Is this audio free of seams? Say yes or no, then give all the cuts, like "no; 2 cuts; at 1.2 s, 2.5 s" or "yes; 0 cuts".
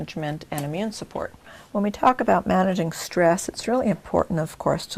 no; 1 cut; at 1.3 s